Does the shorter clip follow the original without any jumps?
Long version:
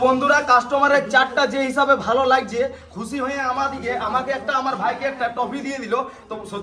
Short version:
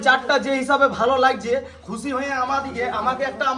yes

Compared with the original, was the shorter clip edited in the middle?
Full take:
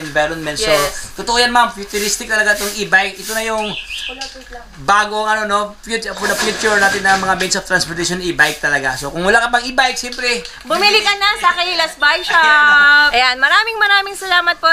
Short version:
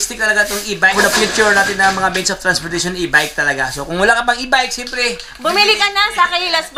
yes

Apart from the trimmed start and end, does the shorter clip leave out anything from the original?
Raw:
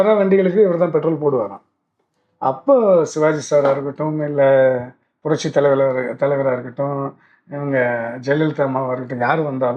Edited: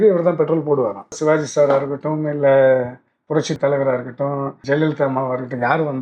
yes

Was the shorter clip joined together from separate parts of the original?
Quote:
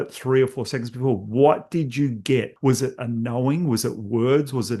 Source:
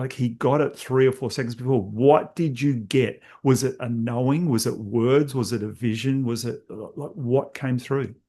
yes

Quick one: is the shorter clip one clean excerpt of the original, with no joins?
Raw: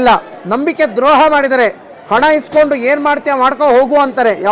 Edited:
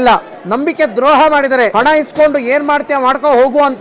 no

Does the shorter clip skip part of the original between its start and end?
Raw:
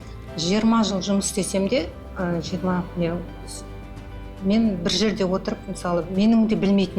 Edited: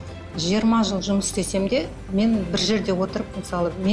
yes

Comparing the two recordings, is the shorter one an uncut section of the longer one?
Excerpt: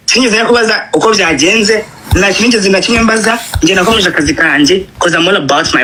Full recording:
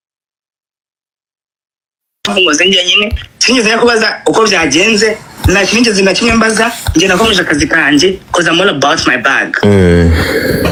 yes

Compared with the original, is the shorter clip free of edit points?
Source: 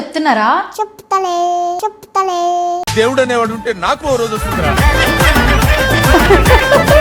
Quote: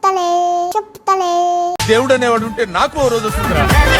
yes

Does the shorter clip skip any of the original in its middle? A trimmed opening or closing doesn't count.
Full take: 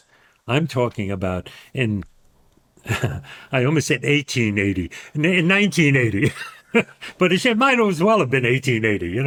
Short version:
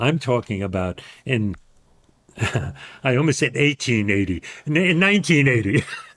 no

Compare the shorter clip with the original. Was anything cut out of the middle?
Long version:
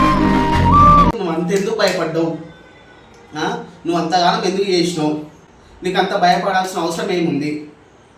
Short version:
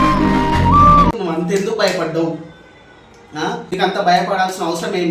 yes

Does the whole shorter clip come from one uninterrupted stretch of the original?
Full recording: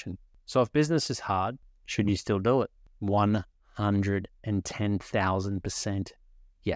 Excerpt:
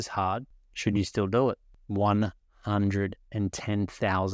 yes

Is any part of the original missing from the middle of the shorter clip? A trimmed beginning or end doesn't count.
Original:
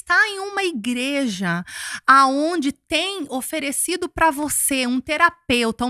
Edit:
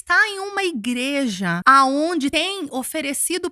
yes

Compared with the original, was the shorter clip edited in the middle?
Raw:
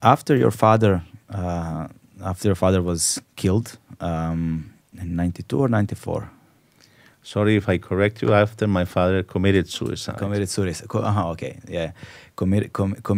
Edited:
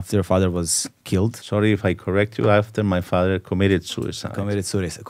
yes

